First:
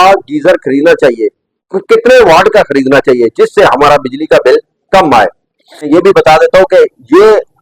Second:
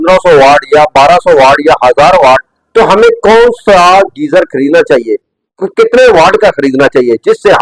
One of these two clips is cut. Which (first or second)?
first